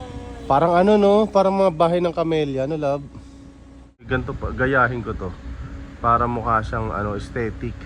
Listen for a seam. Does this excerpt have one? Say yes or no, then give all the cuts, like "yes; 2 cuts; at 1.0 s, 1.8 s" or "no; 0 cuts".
yes; 1 cut; at 4.1 s